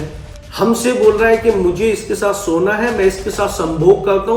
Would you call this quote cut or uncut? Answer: uncut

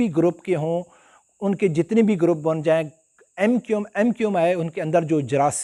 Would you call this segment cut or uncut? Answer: uncut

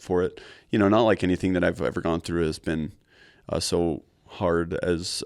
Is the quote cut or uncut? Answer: uncut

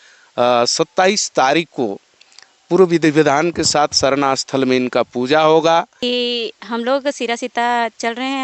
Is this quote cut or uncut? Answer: cut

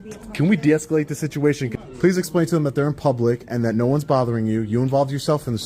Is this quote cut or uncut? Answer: cut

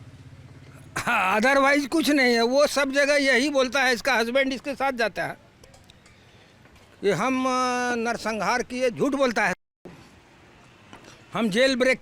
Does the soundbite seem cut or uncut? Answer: uncut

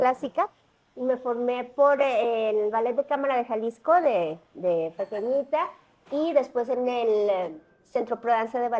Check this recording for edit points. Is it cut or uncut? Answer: uncut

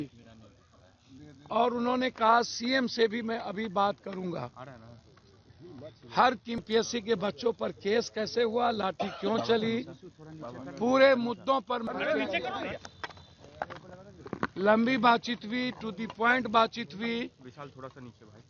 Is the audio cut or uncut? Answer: cut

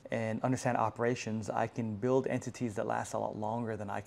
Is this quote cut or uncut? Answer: uncut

